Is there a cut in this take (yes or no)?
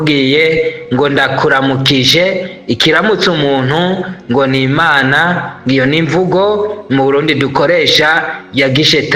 no